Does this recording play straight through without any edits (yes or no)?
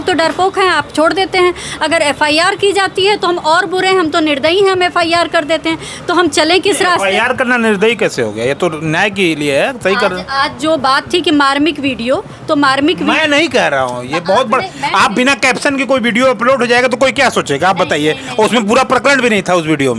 yes